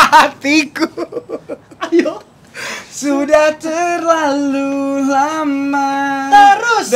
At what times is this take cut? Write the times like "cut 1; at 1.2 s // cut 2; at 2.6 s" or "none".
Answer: none